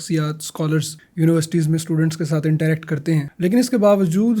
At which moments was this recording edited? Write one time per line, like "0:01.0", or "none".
0:01.0
0:03.3